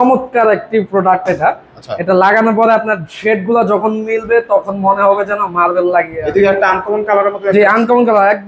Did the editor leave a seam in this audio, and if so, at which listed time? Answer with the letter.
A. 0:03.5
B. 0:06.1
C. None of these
B